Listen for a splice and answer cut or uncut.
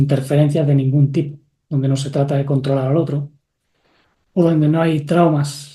uncut